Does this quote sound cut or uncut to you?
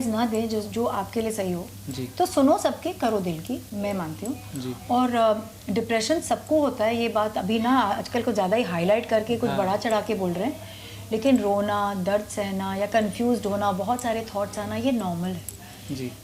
uncut